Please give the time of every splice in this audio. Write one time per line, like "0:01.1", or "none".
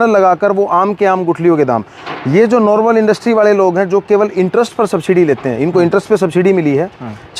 none